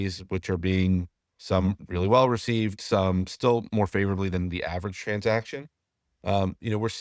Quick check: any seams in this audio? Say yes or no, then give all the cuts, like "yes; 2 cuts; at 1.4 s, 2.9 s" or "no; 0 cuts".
no; 0 cuts